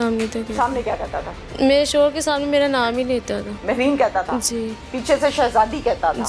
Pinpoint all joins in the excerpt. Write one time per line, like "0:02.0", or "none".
0:01.4